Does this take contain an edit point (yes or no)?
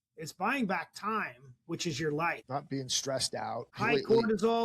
yes